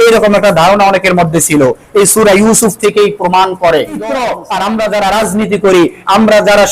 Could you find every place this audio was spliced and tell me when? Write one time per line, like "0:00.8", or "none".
0:04.1